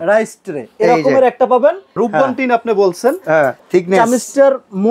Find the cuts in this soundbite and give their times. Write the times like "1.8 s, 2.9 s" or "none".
2.0 s, 3.6 s

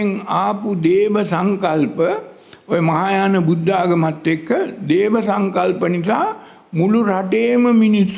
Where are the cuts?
none

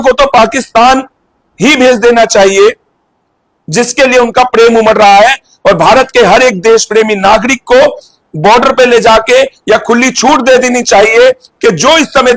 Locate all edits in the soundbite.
none

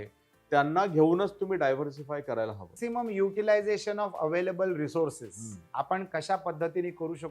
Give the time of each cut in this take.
2.7 s

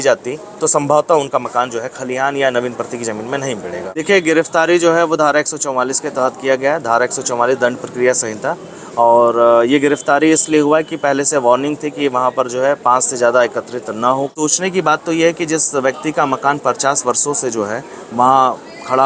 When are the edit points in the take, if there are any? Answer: 4.0 s, 14.3 s

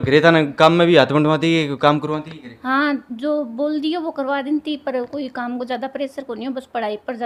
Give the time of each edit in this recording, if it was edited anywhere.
none

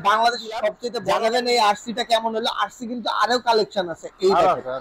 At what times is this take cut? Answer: 0.9 s

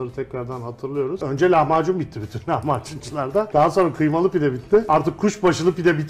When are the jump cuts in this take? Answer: 1.2 s, 3.5 s, 4.9 s

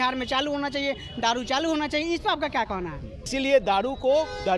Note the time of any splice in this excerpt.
3.3 s

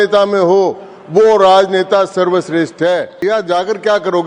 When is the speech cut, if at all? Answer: 3.2 s

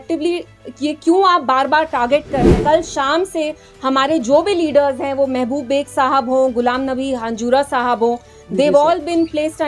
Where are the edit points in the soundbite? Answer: 2.6 s

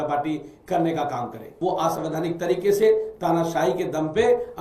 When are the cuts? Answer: 1.5 s

